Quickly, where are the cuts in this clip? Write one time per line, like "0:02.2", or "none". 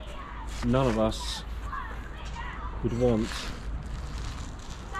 none